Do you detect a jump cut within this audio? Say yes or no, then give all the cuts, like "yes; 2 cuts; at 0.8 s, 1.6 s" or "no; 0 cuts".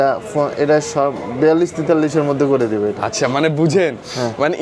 no; 0 cuts